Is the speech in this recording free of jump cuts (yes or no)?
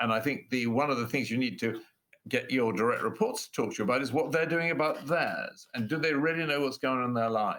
yes